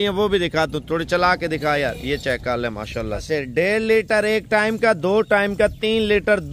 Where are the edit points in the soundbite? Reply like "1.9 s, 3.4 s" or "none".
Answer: 3.2 s